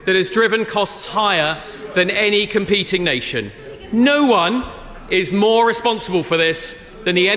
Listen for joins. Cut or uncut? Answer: uncut